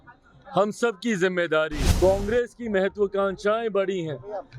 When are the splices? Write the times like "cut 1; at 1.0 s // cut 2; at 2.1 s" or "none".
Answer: cut 1; at 1.8 s